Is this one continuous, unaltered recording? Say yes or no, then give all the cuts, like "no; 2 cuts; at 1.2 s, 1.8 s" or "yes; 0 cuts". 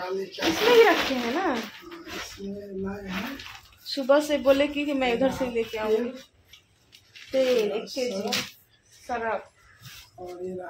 yes; 0 cuts